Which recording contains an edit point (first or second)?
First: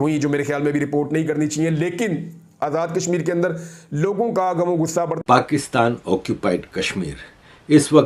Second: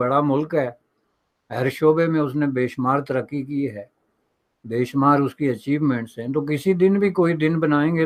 first